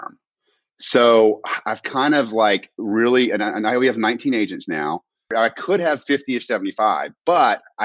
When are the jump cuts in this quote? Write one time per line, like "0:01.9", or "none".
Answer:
0:05.3